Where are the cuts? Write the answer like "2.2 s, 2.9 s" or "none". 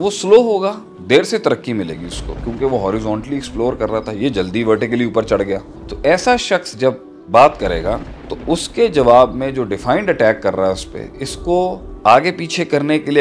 0.9 s